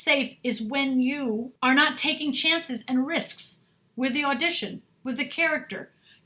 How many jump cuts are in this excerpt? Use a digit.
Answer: 1